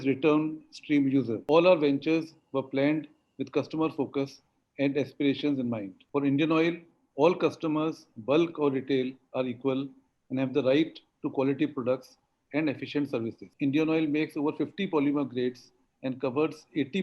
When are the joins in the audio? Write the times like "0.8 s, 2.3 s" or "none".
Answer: 1.4 s, 5.9 s, 13.4 s